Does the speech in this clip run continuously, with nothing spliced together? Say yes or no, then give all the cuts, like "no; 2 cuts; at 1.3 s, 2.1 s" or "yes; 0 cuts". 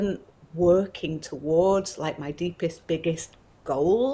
yes; 0 cuts